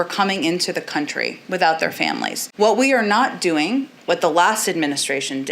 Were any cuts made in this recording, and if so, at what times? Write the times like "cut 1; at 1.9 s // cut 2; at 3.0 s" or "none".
cut 1; at 2.4 s